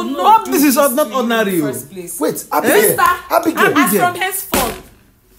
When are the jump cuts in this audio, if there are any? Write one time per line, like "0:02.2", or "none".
none